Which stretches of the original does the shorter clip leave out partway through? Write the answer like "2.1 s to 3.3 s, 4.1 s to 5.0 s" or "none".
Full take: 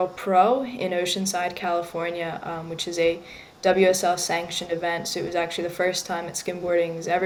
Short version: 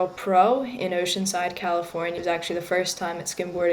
2.2 s to 5.2 s